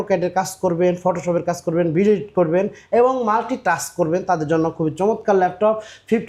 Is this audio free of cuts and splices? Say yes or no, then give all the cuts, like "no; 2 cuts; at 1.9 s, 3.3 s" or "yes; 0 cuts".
yes; 0 cuts